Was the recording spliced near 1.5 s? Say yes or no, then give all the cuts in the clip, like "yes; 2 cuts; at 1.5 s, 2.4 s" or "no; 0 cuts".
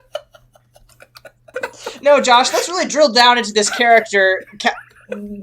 yes; 1 cut; at 1.5 s